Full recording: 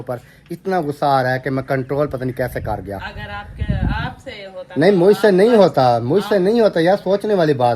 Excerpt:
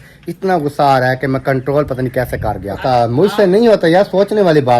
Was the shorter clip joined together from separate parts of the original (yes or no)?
yes